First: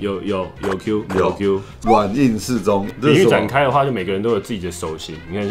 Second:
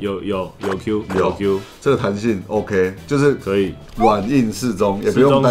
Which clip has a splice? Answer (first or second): first